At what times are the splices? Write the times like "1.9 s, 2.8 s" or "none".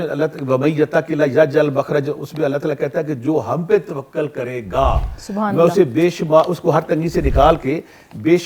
none